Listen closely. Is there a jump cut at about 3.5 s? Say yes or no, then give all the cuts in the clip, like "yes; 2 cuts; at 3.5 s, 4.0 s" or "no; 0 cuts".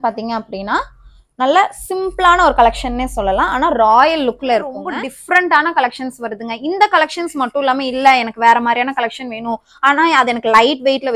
no; 1 cut; at 4.9 s